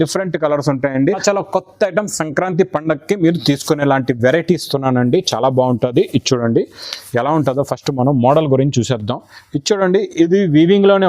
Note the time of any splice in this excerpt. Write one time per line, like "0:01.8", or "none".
0:01.2